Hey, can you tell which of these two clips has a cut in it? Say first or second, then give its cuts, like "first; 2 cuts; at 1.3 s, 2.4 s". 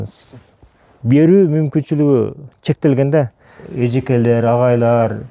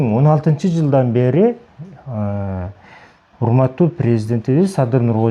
first; 1 cut; at 3.7 s